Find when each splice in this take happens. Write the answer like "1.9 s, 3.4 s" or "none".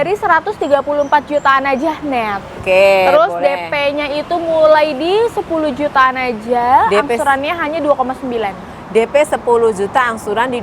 2.6 s